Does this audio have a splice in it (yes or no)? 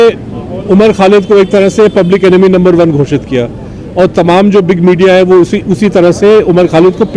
no